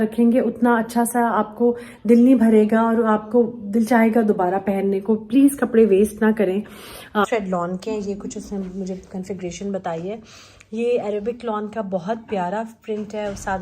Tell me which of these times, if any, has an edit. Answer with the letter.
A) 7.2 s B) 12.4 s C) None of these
A